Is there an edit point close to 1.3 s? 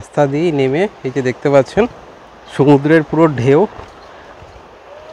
no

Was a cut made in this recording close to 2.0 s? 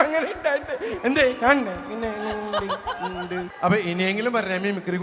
no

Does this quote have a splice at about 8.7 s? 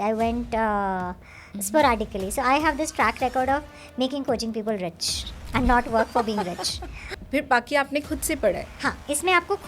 yes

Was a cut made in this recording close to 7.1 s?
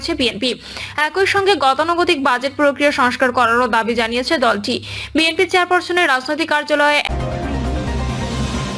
yes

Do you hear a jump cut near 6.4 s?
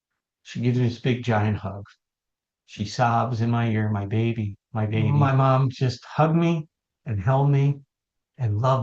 no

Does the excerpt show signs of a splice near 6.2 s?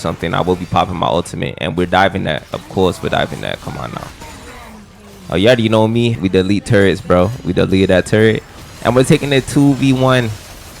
yes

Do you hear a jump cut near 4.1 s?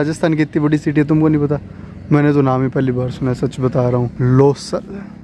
no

